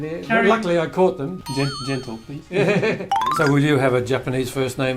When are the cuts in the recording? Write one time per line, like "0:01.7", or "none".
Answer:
0:01.4
0:03.2